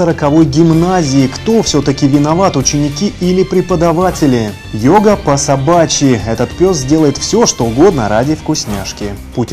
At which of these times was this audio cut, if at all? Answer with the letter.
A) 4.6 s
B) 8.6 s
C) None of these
C